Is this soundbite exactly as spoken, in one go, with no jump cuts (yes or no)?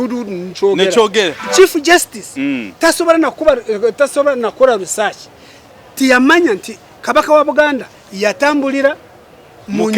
no